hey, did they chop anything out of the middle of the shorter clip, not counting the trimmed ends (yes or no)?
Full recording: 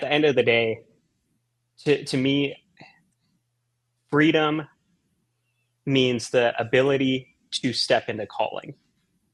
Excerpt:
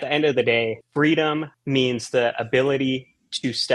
yes